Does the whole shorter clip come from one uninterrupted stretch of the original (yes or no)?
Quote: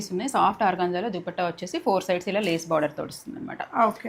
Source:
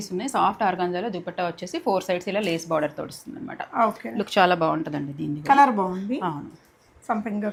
yes